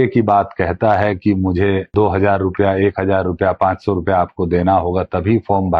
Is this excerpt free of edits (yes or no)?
no